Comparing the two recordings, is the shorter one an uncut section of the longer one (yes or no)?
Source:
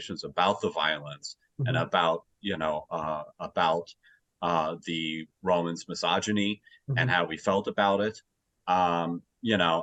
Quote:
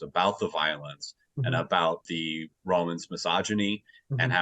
no